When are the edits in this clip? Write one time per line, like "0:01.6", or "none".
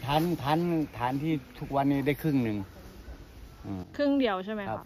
none